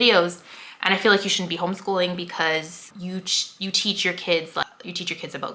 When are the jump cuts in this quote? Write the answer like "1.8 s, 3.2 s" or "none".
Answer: 2.9 s, 4.6 s